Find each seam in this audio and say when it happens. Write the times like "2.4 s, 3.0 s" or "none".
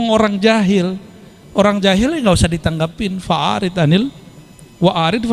none